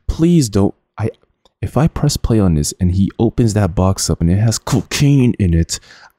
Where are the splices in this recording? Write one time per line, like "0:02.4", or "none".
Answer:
none